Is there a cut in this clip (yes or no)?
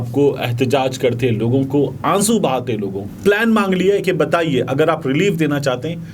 yes